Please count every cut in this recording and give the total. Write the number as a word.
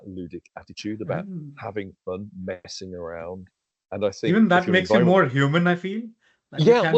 zero